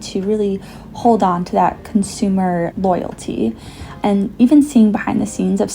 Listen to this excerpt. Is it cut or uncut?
cut